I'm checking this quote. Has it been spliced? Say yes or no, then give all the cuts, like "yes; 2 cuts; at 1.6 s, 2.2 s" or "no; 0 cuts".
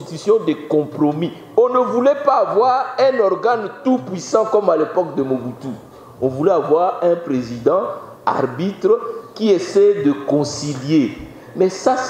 no; 0 cuts